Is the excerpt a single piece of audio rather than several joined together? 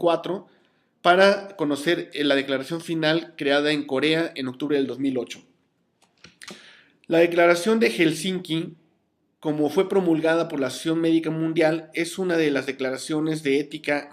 no; 1 cut; at 7.3 s

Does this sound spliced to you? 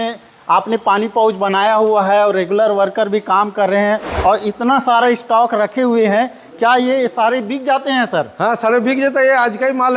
no; 0 cuts

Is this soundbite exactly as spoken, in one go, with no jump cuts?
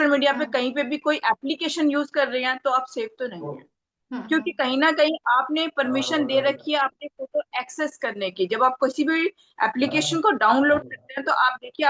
yes; 0 cuts

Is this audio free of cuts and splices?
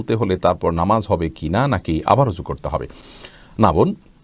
yes; 0 cuts

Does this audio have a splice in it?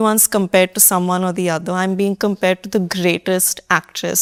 no; 0 cuts

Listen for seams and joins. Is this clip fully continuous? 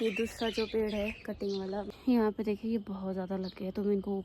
no; 1 cut; at 1.9 s

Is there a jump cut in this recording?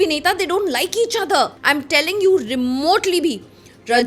yes; 1 cut; at 1.5 s

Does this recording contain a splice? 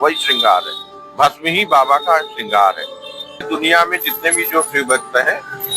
yes; 1 cut; at 3.5 s

